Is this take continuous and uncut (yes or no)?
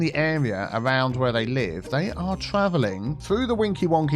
no